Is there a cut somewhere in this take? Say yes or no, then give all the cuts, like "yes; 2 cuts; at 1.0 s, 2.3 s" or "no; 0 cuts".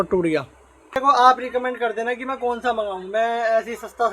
yes; 1 cut; at 1.0 s